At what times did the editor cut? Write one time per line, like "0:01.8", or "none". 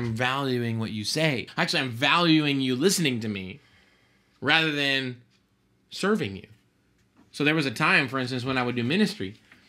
0:01.5